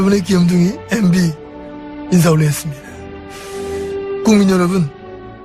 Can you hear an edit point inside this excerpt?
no; 0 cuts

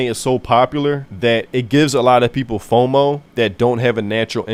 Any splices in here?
no; 0 cuts

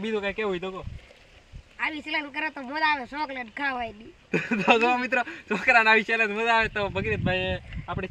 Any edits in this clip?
no; 0 cuts

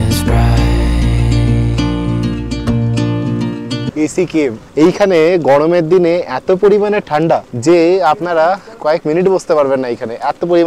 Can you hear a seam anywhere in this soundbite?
yes; 3 cuts; at 4.2 s, 7.5 s, 8.7 s

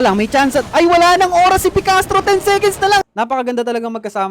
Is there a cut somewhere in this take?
yes; 1 cut; at 3.0 s

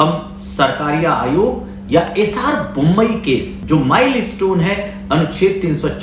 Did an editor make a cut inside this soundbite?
yes; 1 cut; at 3.5 s

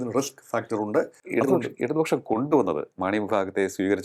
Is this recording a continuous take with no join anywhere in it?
yes; 0 cuts

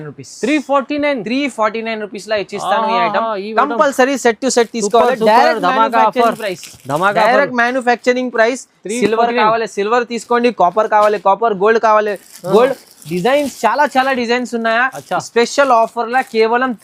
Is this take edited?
no; 0 cuts

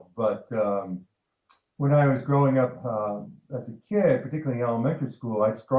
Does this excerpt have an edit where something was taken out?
no; 0 cuts

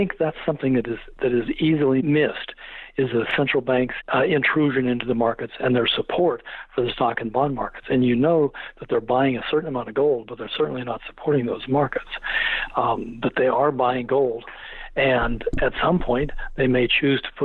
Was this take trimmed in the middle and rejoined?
yes; 2 cuts; at 2.0 s, 4.0 s

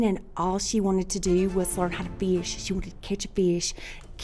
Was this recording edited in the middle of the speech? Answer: no; 0 cuts

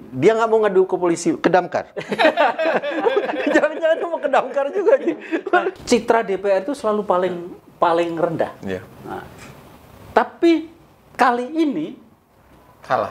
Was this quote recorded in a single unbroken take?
no; 1 cut; at 5.8 s

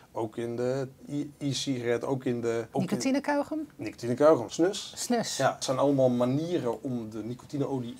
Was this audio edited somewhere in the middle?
yes; 3 cuts; at 2.7 s, 4.5 s, 5.6 s

